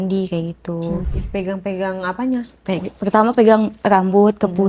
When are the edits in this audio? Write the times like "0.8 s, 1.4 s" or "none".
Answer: 1.1 s